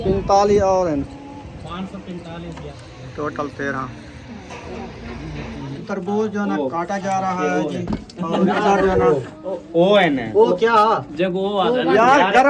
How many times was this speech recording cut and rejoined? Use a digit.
2